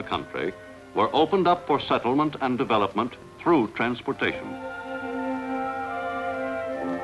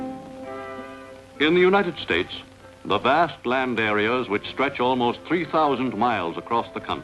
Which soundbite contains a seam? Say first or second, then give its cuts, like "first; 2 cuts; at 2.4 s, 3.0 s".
second; 1 cut; at 5.2 s